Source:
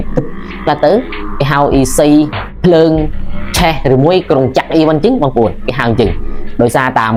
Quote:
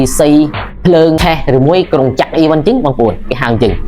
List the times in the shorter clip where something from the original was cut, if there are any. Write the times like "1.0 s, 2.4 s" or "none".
1.2 s